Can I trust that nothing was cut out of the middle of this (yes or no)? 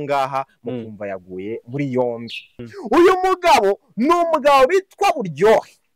no